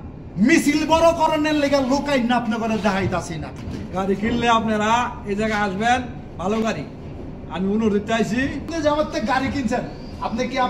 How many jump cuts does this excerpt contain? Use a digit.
2